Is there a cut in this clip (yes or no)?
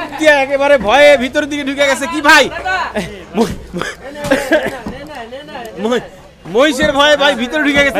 no